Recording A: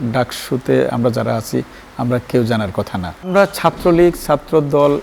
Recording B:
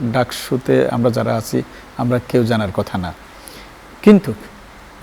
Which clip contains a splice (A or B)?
A